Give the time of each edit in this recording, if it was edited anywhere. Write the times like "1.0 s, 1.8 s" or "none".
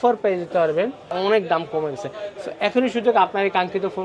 1.1 s